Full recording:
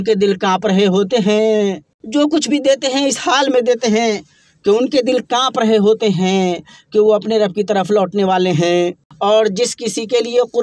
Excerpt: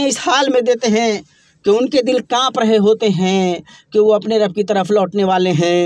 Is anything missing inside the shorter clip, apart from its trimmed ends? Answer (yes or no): no